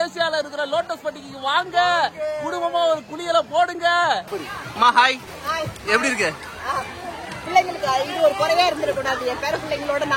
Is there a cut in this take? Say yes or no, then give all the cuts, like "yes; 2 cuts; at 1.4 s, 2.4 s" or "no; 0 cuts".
yes; 2 cuts; at 4.3 s, 5.3 s